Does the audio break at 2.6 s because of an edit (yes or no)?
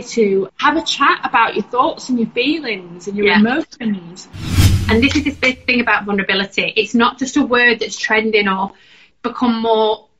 no